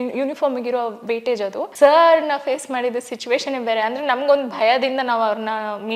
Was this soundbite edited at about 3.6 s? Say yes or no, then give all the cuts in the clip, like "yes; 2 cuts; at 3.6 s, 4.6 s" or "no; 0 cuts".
no; 1 cut; at 1.7 s